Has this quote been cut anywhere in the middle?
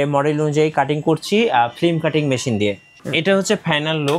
yes; 1 cut; at 2.9 s

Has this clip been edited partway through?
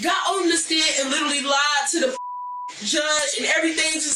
no; 0 cuts

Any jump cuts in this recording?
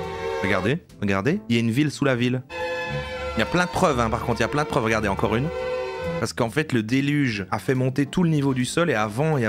yes; 2 cuts; at 2.5 s, 6.2 s

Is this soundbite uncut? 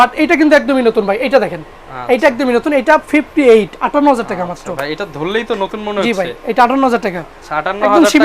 yes; 0 cuts

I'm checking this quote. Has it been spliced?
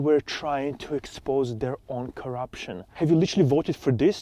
yes; 1 cut; at 2.8 s

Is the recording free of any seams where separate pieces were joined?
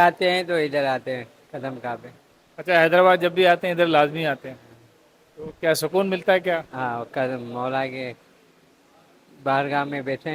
yes; 0 cuts

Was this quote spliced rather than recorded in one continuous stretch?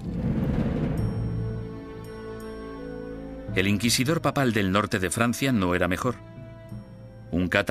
no; 0 cuts

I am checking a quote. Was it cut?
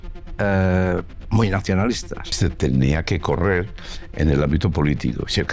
yes; 1 cut; at 2.3 s

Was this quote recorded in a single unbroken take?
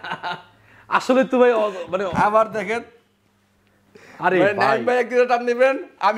yes; 0 cuts

